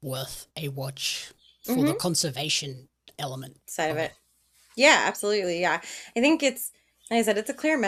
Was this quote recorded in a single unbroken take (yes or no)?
yes